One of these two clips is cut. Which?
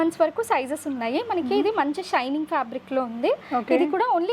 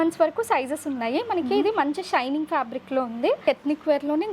second; 1 cut; at 3.4 s

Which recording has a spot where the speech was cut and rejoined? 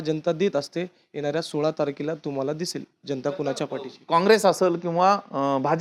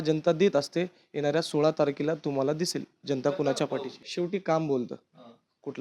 second; 1 cut; at 3.9 s

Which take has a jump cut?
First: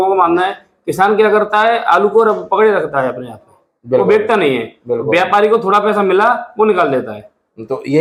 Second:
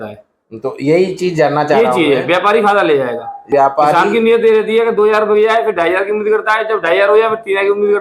second; 1 cut; at 3.4 s

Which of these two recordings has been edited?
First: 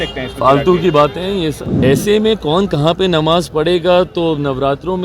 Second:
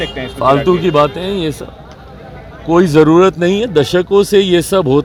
first; 1 cut; at 1.7 s

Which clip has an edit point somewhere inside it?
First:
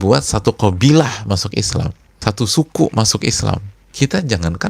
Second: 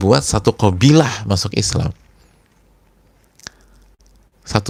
first; 2 cuts; at 2.0 s, 3.8 s

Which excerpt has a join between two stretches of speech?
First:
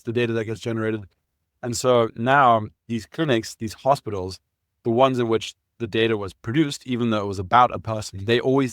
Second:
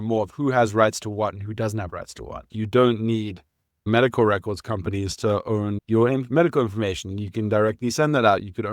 second; 3 cuts; at 2.4 s, 3.9 s, 5.8 s

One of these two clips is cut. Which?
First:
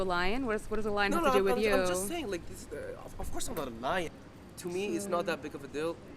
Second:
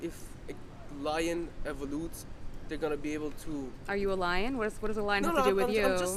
first; 1 cut; at 4.1 s

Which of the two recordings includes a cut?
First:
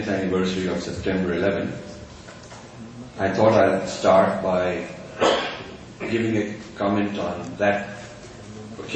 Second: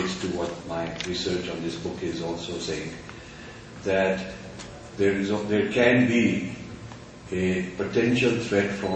first; 1 cut; at 7.7 s

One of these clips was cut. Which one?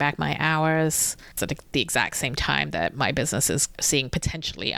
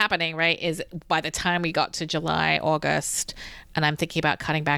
first; 2 cuts; at 1.4 s, 3.7 s

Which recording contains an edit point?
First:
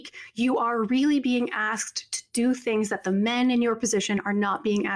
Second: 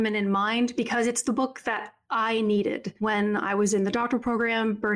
second; 1 cut; at 2.9 s

